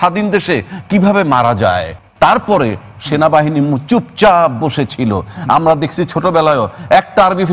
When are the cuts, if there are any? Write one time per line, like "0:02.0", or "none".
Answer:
0:02.0